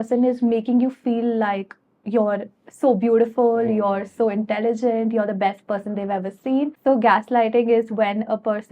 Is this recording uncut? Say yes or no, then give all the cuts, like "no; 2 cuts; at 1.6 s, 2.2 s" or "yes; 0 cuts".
no; 1 cut; at 6.8 s